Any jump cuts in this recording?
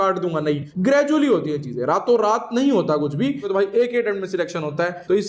yes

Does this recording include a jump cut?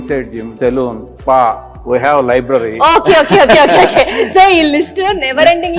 no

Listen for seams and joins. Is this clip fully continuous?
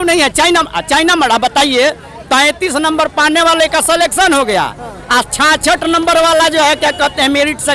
yes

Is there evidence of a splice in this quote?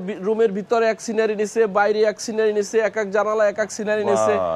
no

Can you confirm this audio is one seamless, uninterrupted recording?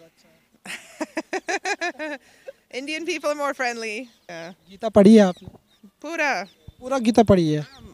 no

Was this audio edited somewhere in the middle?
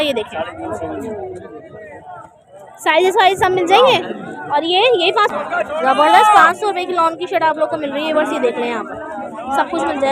yes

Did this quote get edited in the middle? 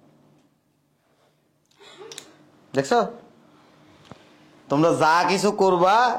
no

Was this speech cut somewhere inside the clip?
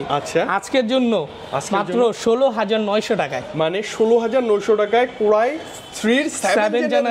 no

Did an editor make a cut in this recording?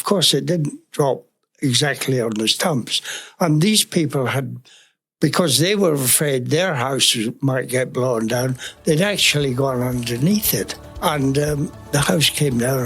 yes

